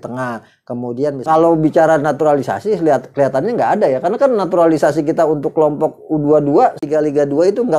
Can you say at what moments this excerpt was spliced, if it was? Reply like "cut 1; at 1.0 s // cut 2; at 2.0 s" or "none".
cut 1; at 1.2 s // cut 2; at 6.8 s